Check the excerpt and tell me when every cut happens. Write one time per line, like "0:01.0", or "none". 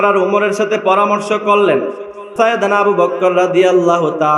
0:02.3